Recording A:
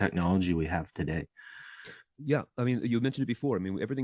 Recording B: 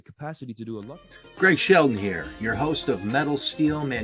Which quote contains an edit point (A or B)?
B